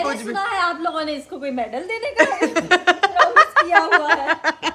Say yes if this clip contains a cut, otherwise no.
no